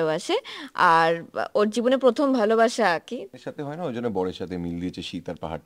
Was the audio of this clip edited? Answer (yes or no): yes